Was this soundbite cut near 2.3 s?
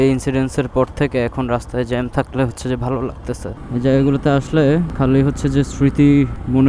no; 1 cut; at 3.6 s

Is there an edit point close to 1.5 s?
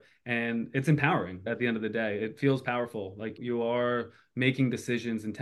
yes; 2 cuts; at 1.5 s, 3.4 s

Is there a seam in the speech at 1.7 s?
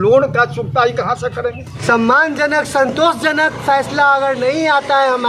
yes; 1 cut; at 1.7 s

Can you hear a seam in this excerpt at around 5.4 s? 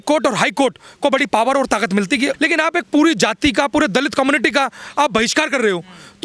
no; 1 cut; at 2.3 s

